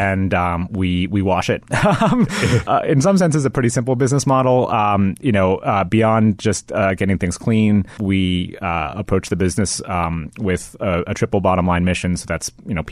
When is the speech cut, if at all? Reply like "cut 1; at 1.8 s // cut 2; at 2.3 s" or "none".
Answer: cut 1; at 2.6 s // cut 2; at 8.0 s